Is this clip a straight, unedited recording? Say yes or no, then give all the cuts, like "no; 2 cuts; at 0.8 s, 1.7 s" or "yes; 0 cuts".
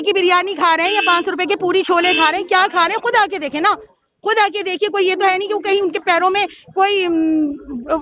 yes; 0 cuts